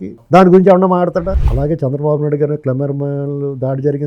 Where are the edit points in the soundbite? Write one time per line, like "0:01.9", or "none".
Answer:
0:01.4